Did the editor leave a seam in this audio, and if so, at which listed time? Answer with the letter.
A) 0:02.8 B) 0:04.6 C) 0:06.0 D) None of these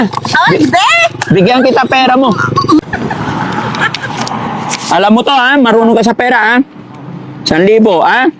A